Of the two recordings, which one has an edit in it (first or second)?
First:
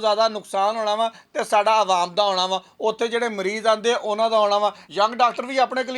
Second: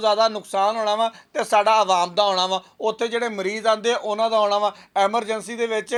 first